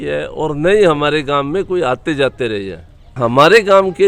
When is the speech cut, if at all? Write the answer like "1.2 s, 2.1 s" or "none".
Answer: 3.2 s